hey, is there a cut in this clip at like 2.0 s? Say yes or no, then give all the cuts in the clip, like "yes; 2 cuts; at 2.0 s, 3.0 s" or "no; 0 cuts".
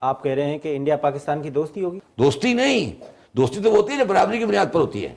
yes; 1 cut; at 2.0 s